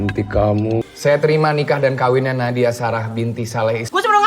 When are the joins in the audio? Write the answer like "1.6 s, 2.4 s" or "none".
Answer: 0.9 s